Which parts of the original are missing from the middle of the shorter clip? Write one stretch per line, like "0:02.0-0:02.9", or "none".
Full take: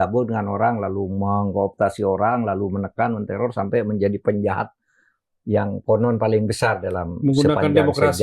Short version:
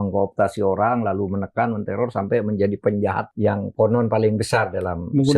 0:04.7-0:05.4